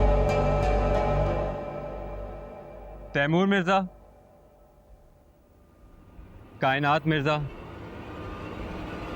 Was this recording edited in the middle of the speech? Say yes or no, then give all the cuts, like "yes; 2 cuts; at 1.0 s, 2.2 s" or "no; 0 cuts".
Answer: no; 0 cuts